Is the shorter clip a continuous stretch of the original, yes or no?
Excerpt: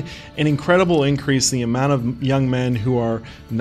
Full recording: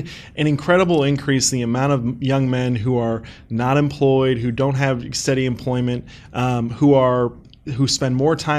yes